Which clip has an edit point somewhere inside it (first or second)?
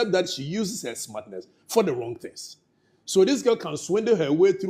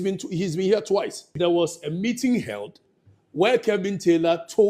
second